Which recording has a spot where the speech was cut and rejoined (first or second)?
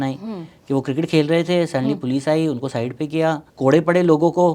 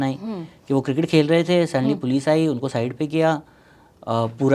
first